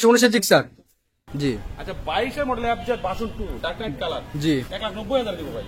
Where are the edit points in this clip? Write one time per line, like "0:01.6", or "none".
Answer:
0:01.2

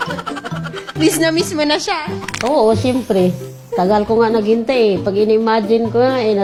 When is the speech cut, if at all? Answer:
none

